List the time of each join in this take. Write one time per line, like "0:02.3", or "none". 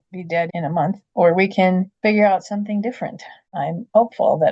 0:03.6